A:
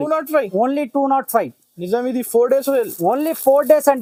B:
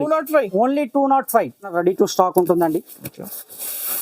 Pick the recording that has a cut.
B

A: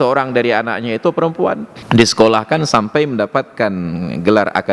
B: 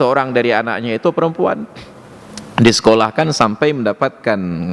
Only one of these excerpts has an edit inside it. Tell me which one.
A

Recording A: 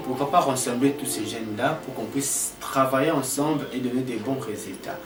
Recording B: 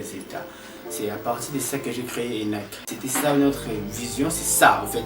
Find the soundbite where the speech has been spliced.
B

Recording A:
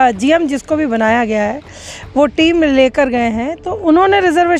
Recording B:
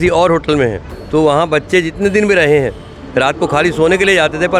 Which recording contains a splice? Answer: B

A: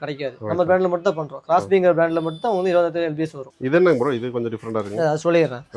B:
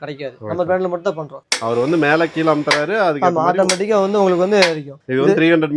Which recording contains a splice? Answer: B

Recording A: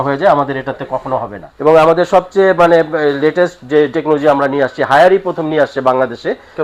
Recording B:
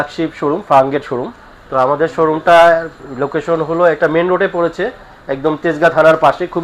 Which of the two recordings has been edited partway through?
A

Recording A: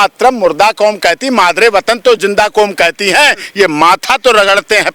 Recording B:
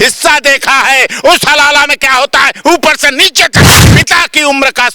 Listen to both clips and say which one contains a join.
B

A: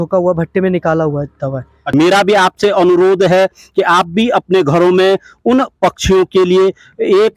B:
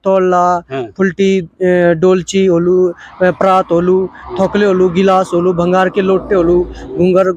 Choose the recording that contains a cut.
A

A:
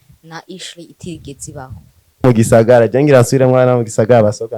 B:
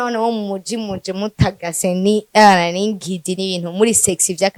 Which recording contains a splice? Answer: A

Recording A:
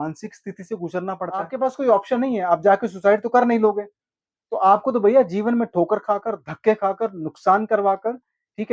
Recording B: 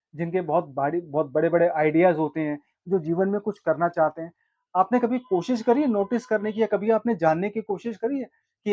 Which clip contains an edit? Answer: A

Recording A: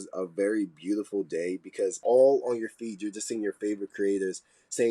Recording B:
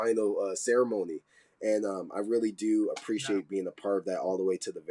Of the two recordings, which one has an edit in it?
A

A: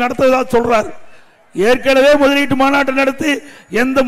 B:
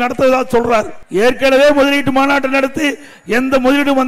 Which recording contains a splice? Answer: B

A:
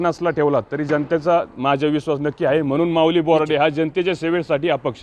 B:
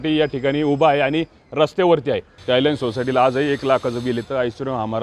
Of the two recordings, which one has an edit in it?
B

